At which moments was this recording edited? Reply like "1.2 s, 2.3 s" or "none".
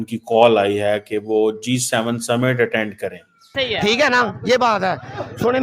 3.5 s